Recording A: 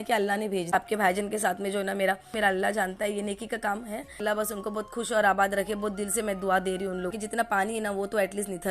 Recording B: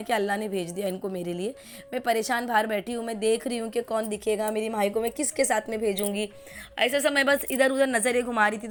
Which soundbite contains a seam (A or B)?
A